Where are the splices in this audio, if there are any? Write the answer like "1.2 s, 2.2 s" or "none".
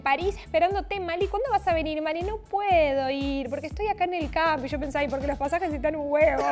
none